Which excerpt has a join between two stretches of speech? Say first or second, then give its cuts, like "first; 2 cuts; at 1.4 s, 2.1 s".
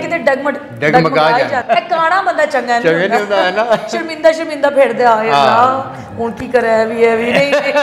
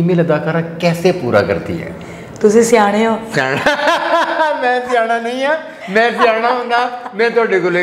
first; 1 cut; at 1.6 s